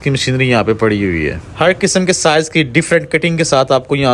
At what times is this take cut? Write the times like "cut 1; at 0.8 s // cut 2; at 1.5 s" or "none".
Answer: cut 1; at 1.4 s

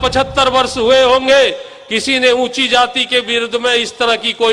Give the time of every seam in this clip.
none

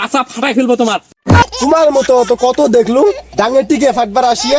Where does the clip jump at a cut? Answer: cut 1; at 1.4 s

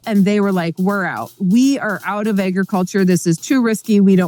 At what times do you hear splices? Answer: none

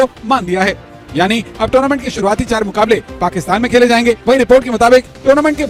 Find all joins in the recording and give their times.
none

